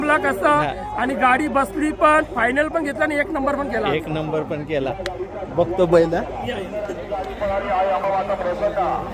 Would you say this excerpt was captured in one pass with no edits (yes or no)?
yes